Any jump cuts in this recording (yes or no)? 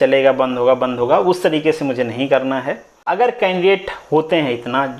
yes